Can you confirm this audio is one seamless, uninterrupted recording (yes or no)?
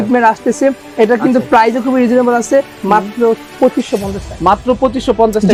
yes